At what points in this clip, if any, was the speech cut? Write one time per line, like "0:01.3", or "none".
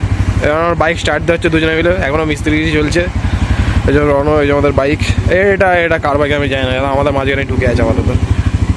none